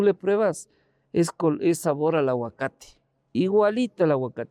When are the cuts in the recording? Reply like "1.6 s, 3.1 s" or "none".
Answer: none

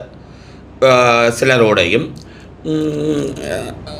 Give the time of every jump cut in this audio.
none

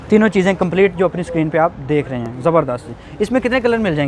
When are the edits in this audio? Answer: none

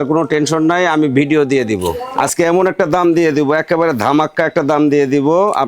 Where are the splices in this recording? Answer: 2.0 s

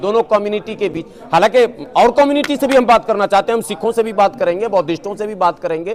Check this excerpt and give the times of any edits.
none

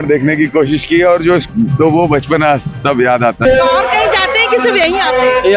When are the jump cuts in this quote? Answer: 1.5 s, 3.4 s

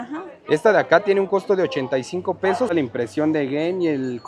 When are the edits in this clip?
2.7 s

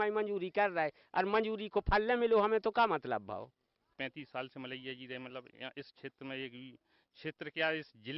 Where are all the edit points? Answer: 3.9 s

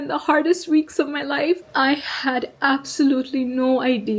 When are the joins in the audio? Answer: 1.6 s

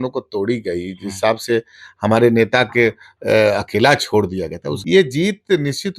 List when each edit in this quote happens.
4.7 s

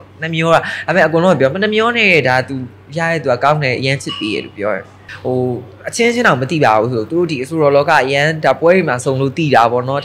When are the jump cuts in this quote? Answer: 5.1 s

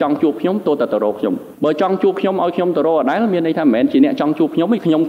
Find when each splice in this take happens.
1.5 s

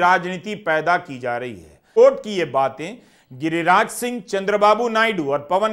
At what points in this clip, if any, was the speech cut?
1.8 s

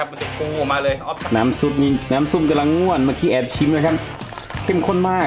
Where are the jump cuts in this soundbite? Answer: 1.3 s

